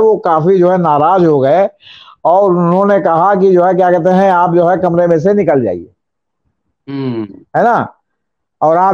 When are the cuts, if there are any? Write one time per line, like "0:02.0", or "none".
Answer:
none